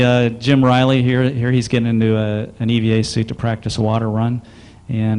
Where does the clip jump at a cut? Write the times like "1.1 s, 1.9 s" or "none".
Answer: none